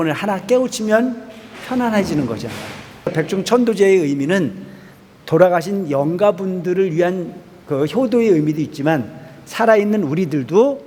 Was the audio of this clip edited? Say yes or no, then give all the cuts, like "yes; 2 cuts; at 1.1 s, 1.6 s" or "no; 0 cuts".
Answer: yes; 1 cut; at 3.1 s